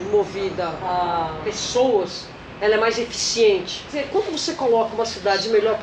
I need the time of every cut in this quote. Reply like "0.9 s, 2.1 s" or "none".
0.9 s, 4.1 s